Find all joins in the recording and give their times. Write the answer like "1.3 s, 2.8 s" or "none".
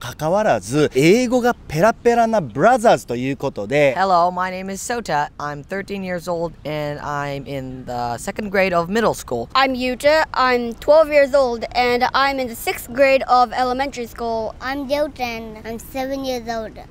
3.9 s, 9.5 s, 14.5 s